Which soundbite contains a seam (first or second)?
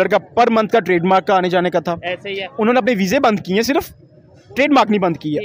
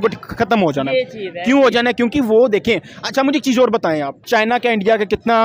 second